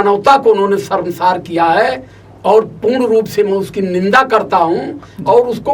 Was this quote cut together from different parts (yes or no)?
no